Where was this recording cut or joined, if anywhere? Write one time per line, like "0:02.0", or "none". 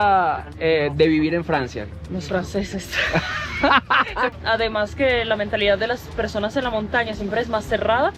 0:04.3

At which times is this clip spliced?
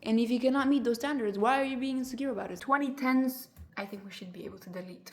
0:02.6
0:03.5

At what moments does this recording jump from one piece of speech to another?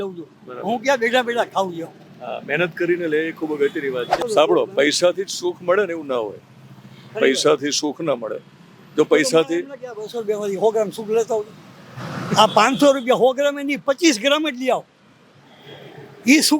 0:04.1

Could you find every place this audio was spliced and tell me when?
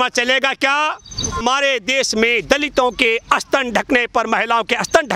0:01.4

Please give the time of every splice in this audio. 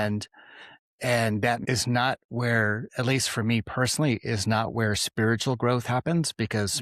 0:01.6

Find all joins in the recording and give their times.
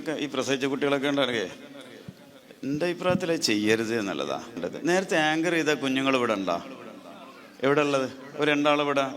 0:04.6

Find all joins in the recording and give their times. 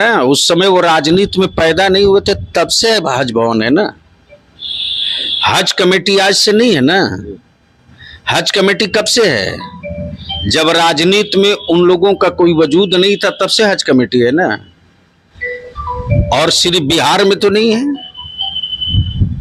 none

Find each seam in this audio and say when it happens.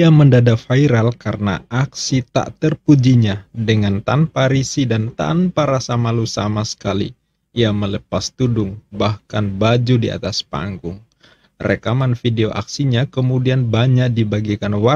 none

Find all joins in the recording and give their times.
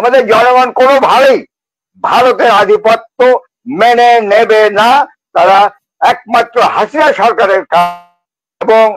none

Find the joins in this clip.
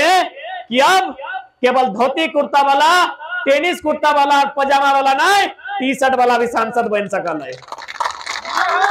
none

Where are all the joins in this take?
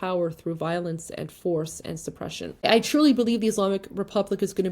0:02.6

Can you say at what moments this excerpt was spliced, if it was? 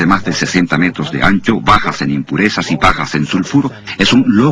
0:01.0

